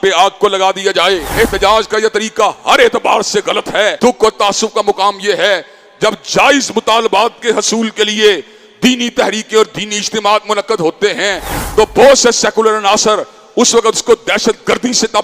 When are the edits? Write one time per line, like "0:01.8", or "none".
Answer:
0:01.3
0:04.0